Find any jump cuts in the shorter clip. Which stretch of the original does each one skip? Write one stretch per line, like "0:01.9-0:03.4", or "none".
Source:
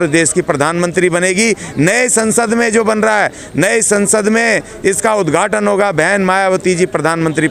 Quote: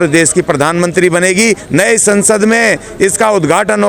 0:01.6-0:03.5